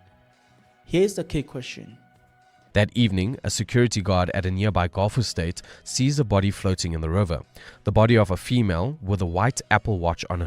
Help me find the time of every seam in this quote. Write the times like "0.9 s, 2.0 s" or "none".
2.5 s